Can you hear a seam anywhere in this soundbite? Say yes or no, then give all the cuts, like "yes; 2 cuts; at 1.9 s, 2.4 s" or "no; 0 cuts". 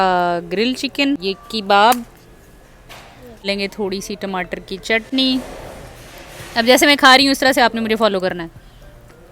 yes; 2 cuts; at 1.2 s, 3.5 s